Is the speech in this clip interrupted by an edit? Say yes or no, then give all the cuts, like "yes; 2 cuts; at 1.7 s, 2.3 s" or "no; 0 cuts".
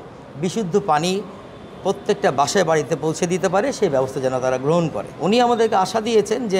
yes; 1 cut; at 5.1 s